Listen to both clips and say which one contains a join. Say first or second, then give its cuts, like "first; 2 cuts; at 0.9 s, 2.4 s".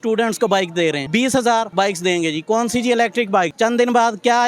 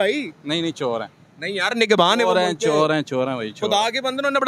first; 3 cuts; at 1.0 s, 1.7 s, 3.5 s